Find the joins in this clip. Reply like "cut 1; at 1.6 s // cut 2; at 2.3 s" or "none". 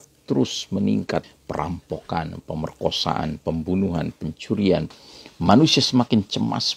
cut 1; at 1.4 s // cut 2; at 4.9 s